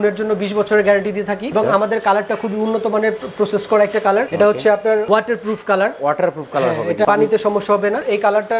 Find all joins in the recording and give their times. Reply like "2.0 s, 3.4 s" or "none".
none